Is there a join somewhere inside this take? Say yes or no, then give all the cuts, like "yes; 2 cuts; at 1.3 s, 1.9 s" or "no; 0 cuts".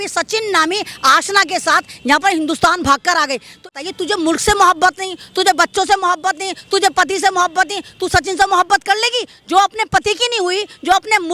yes; 1 cut; at 3.7 s